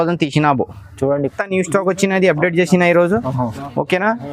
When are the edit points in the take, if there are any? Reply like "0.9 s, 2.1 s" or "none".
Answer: 1.3 s